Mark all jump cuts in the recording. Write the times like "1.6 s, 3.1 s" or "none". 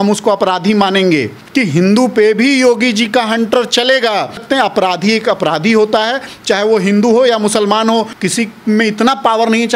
1.4 s, 4.4 s, 8.2 s